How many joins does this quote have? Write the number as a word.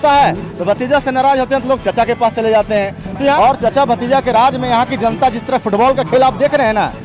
one